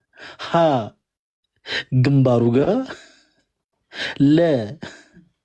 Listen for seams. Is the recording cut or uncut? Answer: uncut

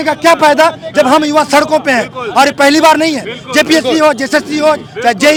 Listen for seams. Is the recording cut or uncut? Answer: uncut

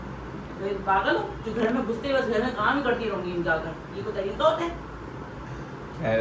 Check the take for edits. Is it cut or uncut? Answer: uncut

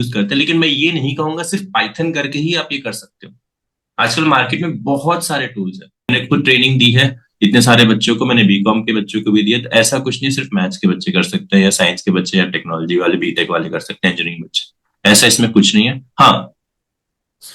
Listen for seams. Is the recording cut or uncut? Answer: cut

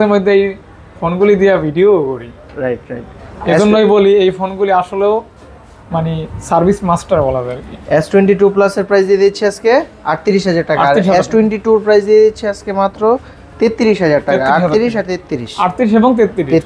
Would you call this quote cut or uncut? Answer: uncut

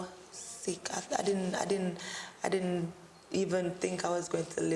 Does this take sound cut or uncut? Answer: uncut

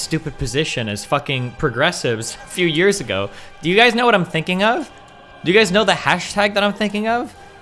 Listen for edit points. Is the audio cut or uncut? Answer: uncut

